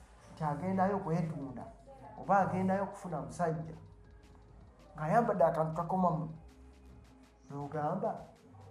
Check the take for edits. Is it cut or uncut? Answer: uncut